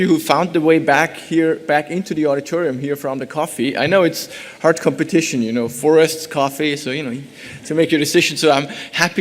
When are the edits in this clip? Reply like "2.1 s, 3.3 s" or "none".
7.7 s